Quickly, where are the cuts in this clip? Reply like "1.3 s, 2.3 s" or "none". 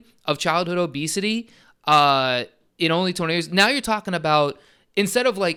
none